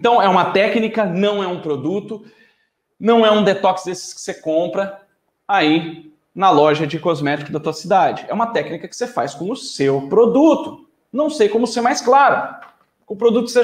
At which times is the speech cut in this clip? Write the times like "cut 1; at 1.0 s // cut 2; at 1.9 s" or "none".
none